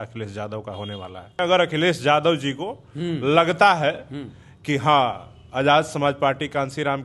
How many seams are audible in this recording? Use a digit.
1